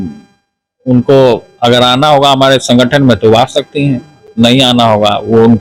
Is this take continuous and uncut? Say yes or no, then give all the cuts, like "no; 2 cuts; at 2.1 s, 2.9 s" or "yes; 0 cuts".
yes; 0 cuts